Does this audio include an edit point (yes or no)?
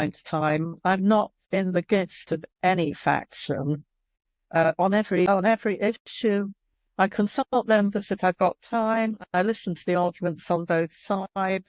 yes